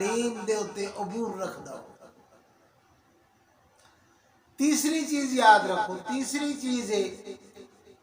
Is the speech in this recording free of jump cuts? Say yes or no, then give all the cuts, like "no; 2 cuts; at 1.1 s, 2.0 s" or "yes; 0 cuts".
yes; 0 cuts